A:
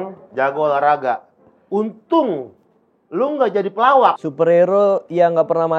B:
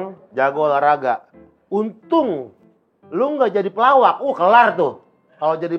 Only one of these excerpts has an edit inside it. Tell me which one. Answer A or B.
A